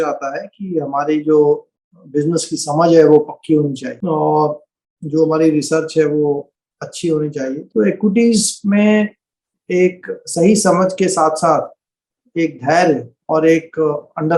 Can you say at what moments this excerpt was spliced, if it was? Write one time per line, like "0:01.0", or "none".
0:03.9
0:07.6